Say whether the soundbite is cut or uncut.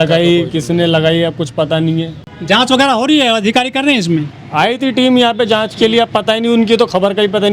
uncut